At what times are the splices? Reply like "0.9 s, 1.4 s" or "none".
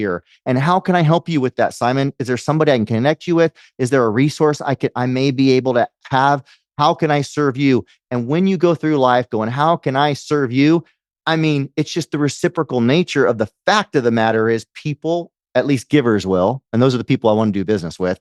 none